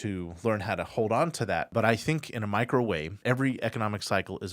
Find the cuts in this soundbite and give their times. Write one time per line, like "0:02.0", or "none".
0:01.7
0:03.2

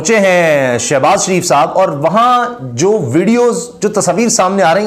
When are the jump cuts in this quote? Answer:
none

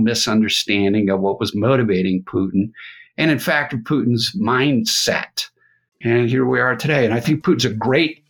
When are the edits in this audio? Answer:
0:05.9
0:07.2

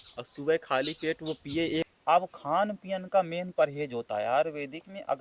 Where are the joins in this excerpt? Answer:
0:01.9

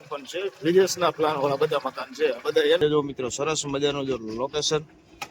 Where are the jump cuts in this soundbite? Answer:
0:02.8

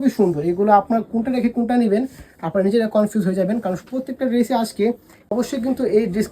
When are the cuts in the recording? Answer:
0:05.1

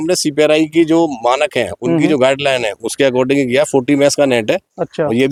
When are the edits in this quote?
none

